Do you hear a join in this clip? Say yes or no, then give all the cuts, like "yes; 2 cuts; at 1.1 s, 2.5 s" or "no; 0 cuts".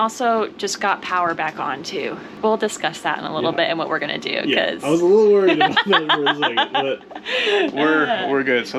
no; 0 cuts